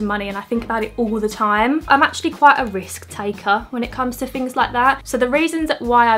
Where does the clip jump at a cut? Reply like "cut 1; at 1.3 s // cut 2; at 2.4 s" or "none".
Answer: cut 1; at 1.8 s // cut 2; at 5.0 s